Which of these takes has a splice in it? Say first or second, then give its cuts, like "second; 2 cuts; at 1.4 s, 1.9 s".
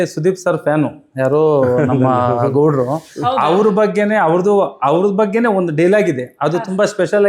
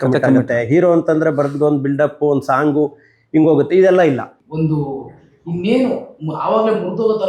second; 1 cut; at 4.4 s